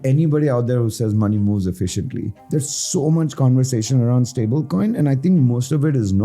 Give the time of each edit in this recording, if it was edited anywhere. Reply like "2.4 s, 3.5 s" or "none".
2.3 s